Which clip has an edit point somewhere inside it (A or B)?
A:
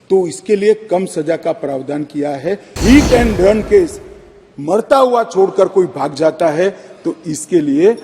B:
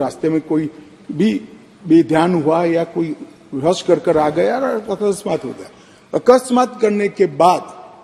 A